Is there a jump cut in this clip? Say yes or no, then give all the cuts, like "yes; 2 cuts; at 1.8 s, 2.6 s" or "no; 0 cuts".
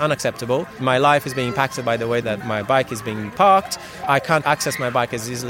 yes; 3 cuts; at 0.8 s, 2.2 s, 4.2 s